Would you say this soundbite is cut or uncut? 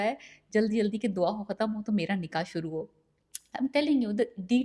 uncut